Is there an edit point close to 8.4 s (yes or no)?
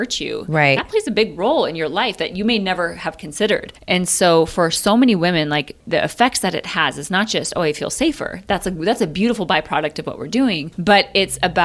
no